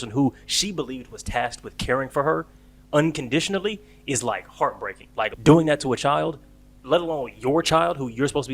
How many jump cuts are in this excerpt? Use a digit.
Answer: 1